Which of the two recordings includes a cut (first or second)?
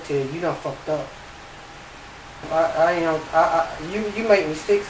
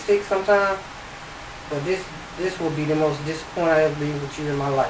first